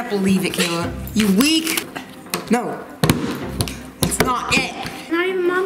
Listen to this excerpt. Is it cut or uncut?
cut